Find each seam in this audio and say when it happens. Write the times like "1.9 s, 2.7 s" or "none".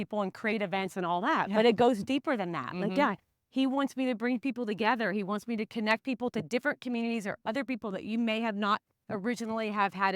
9.0 s